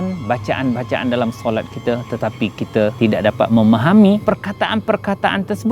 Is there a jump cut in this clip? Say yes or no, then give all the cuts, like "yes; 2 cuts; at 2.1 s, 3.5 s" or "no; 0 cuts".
yes; 1 cut; at 4.2 s